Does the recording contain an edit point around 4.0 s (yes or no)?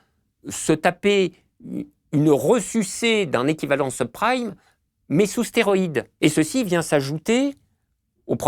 no